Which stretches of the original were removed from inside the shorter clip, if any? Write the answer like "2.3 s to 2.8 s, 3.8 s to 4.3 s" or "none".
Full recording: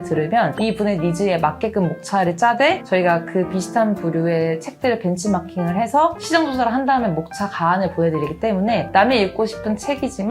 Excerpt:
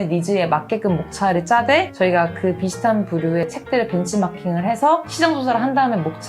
4.3 s to 4.6 s